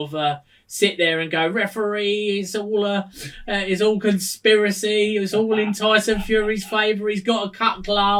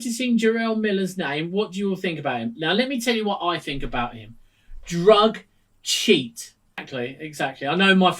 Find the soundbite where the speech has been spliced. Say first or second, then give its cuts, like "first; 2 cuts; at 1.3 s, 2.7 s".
second; 1 cut; at 6.9 s